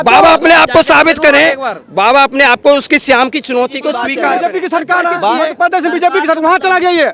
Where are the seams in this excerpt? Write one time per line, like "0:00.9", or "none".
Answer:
0:04.1

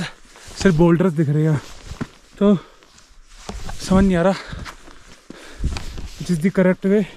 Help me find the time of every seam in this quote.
none

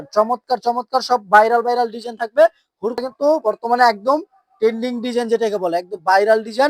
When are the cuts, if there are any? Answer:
0:03.0

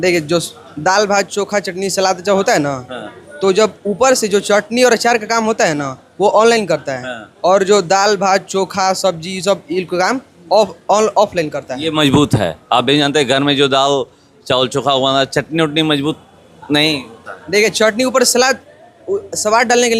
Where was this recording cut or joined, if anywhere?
none

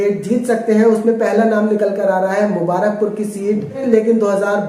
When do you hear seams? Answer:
0:03.8

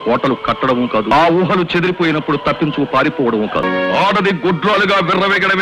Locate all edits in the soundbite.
0:01.1
0:03.6

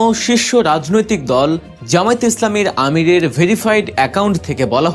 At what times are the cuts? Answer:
0:01.7

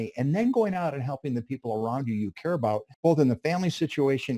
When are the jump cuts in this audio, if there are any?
0:02.9

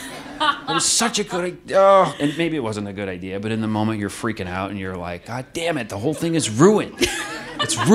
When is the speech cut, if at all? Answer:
none

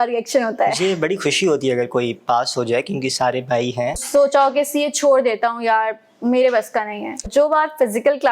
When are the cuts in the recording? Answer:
0:04.0
0:07.3

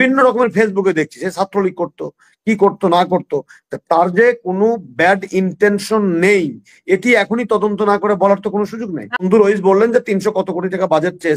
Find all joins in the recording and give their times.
0:09.2

